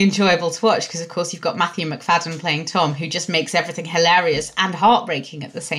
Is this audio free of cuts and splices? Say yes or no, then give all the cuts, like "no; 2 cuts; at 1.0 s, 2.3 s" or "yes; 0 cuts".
yes; 0 cuts